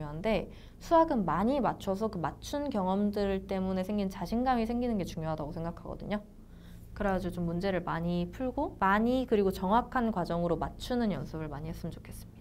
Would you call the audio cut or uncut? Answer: cut